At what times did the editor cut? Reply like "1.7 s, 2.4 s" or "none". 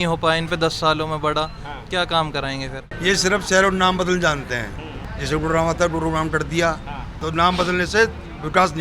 2.9 s, 7.2 s